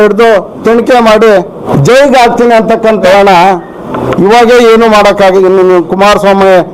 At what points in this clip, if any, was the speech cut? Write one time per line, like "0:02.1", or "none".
0:01.7
0:03.0

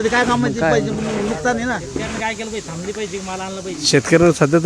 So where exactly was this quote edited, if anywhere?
0:02.1

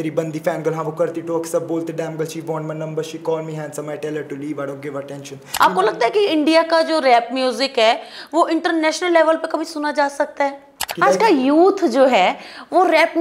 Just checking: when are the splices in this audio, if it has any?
0:05.4
0:10.8

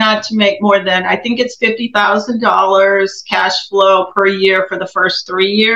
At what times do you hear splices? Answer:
none

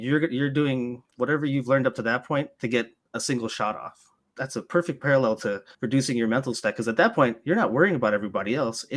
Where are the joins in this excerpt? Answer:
0:01.0
0:02.5
0:04.3
0:05.7

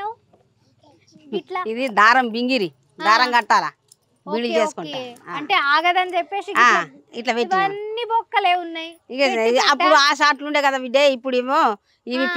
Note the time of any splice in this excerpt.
none

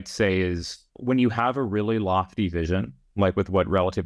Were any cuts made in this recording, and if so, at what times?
0:00.9
0:03.0

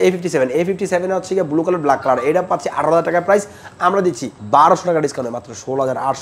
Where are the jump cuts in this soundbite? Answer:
0:04.3

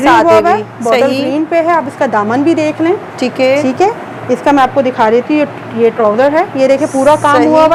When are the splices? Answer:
none

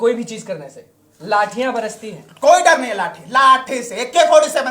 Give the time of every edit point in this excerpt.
none

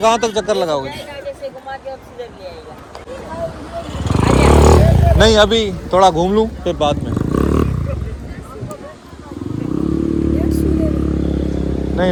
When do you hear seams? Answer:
none

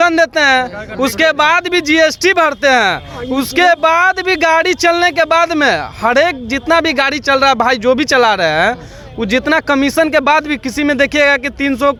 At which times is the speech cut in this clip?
none

